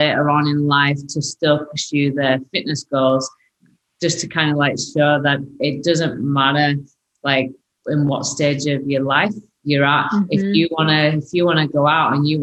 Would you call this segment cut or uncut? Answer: uncut